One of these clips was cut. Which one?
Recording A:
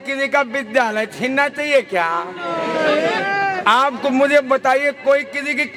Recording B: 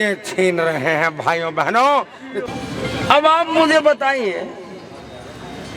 B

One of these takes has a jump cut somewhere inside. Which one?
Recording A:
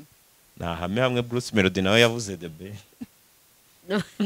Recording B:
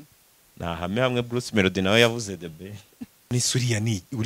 B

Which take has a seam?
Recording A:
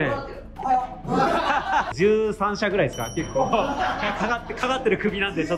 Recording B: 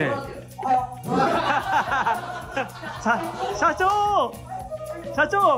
A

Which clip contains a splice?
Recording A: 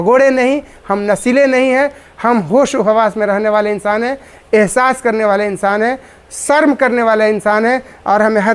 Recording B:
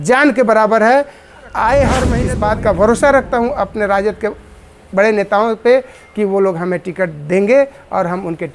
B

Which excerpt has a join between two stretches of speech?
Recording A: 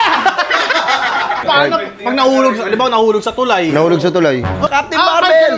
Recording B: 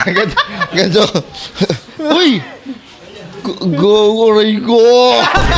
A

